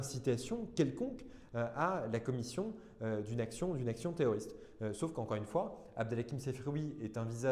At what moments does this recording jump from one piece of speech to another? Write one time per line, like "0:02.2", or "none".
none